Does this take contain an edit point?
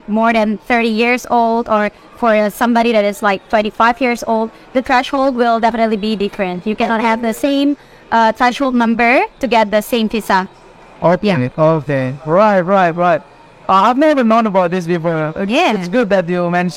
no; 0 cuts

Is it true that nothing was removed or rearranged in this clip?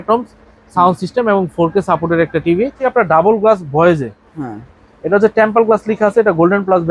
no; 1 cut; at 2.8 s

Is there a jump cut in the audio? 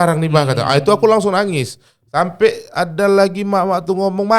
no; 0 cuts

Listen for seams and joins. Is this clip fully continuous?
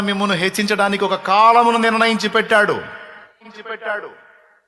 yes; 0 cuts

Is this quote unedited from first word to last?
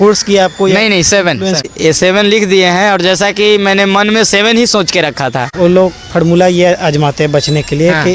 no; 2 cuts; at 1.6 s, 5.5 s

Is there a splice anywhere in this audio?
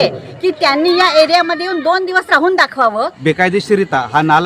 yes; 1 cut; at 3.1 s

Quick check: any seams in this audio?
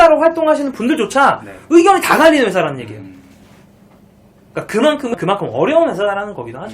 yes; 1 cut; at 5.1 s

